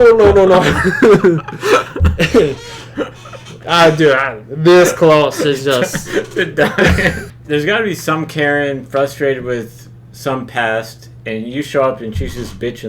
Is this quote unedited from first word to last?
no; 1 cut; at 7.2 s

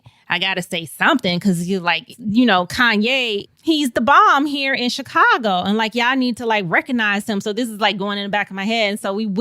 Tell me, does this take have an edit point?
yes; 1 cut; at 2.1 s

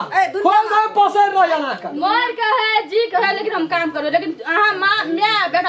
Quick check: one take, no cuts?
yes; 0 cuts

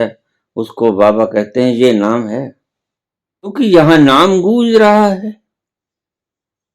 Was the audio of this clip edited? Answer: yes; 1 cut; at 3.5 s

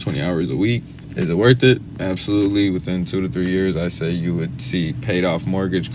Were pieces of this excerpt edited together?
yes; 2 cuts; at 1.0 s, 1.9 s

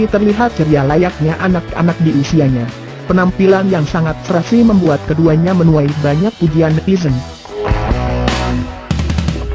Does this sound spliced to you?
no; 0 cuts

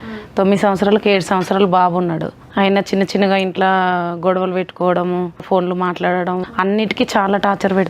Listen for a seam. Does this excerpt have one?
yes; 3 cuts; at 2.4 s, 5.4 s, 6.5 s

